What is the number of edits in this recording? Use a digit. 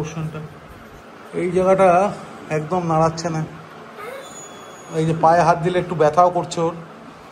0